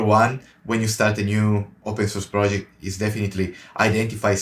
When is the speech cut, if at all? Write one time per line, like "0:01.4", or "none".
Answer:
none